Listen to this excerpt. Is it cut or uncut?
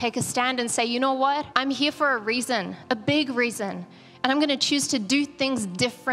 cut